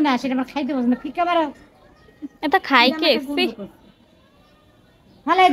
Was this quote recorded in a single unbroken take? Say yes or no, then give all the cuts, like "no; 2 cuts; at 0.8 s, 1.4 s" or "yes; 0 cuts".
yes; 0 cuts